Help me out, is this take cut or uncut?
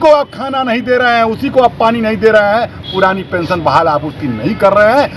uncut